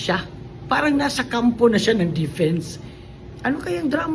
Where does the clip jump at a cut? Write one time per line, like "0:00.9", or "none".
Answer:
0:02.8